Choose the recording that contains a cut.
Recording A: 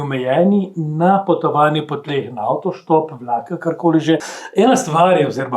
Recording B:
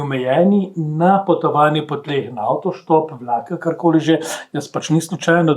A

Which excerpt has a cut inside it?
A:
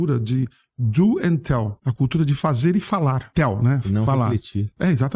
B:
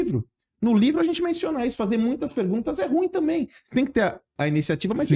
A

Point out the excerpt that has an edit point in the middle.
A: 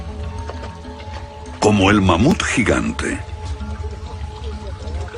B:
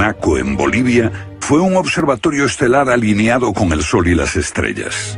B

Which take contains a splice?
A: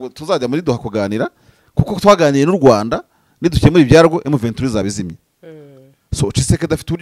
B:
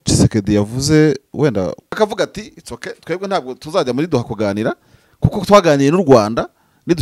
B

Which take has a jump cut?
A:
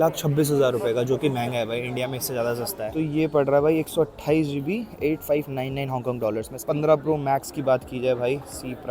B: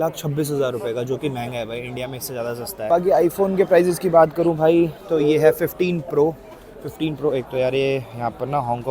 A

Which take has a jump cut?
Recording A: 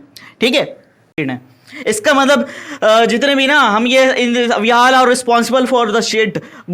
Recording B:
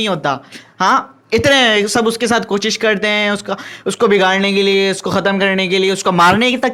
A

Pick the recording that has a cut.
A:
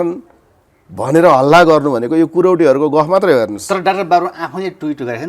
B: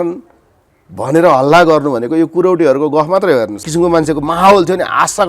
B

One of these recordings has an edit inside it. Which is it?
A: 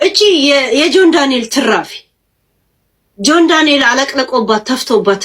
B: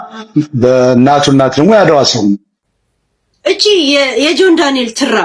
B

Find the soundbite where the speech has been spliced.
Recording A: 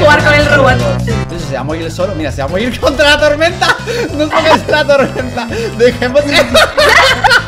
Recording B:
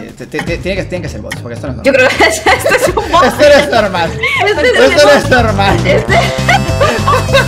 A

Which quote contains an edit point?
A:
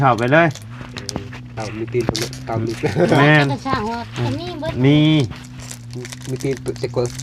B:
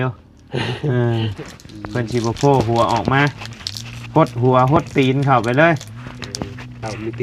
B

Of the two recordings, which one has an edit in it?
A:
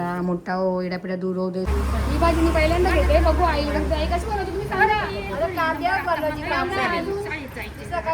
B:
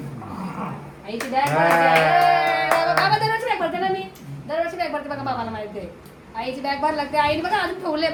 A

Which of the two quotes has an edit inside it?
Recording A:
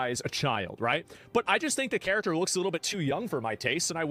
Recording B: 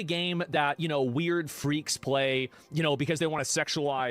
B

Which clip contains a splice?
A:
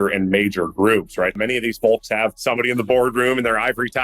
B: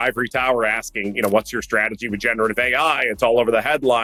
A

